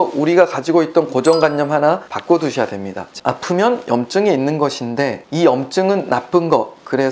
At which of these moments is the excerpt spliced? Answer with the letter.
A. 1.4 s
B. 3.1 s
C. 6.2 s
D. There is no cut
B